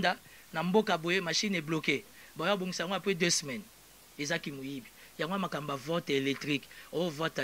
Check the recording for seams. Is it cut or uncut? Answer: uncut